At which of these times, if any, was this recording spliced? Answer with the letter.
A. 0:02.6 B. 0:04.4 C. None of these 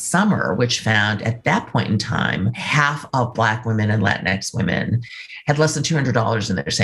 A